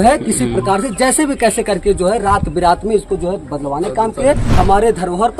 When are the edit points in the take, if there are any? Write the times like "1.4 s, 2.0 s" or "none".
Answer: 4.5 s